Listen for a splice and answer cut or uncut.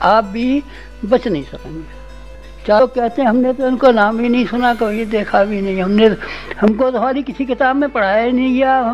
cut